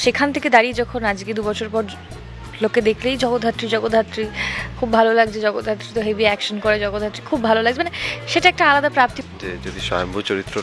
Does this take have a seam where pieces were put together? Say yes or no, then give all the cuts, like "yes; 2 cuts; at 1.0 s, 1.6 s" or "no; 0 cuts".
yes; 1 cut; at 9.2 s